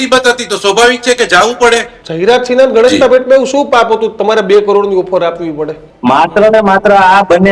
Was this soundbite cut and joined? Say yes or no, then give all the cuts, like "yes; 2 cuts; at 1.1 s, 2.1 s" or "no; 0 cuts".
yes; 2 cuts; at 2.0 s, 5.8 s